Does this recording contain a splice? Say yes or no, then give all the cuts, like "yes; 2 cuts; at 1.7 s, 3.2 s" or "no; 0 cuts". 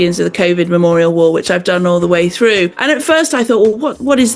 yes; 1 cut; at 2.8 s